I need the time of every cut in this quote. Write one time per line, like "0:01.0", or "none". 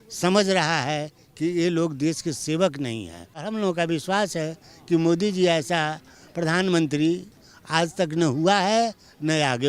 0:03.5